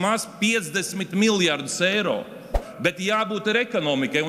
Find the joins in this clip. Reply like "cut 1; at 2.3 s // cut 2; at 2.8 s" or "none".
cut 1; at 2.6 s